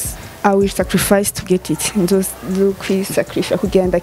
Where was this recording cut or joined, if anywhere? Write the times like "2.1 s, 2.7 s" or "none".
none